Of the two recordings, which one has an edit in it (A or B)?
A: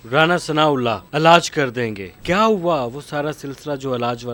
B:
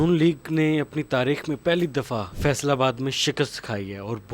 B